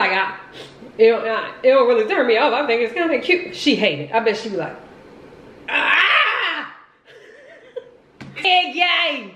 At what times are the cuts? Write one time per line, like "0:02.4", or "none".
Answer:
0:08.4

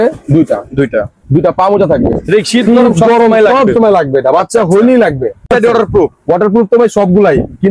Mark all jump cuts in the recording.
0:05.5

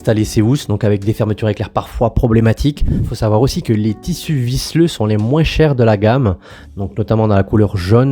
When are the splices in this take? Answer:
0:02.9

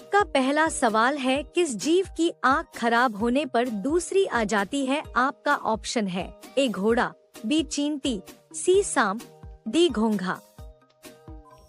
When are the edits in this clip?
none

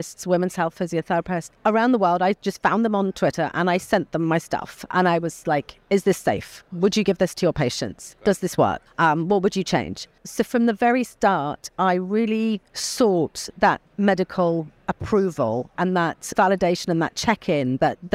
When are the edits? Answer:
0:01.5
0:08.9
0:10.2
0:12.8
0:13.9
0:15.9

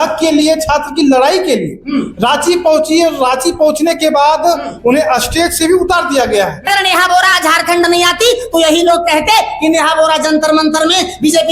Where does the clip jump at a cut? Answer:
0:06.7

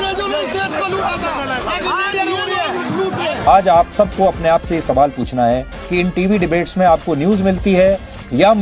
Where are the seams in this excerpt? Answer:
0:03.5

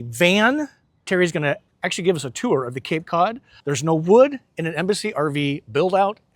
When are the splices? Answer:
0:01.0
0:03.5

